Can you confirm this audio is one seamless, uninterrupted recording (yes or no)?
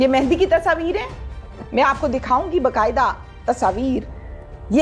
yes